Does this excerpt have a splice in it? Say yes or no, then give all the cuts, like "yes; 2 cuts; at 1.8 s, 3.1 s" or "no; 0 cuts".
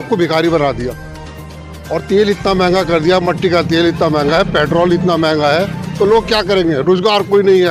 no; 0 cuts